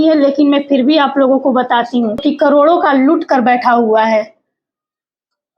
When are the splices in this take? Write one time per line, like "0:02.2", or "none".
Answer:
0:02.2